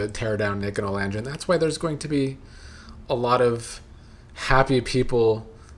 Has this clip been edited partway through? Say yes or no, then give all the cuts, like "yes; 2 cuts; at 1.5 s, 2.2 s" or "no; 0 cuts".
no; 0 cuts